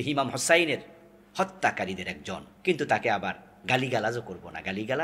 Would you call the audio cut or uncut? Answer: cut